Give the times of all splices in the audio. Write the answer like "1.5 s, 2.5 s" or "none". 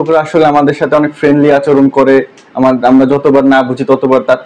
none